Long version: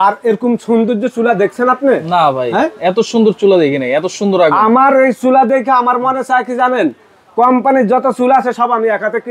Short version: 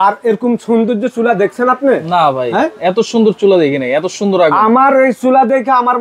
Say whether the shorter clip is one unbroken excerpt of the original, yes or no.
yes